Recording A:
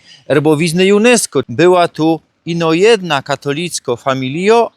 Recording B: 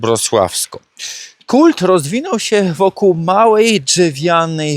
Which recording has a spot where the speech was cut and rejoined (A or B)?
A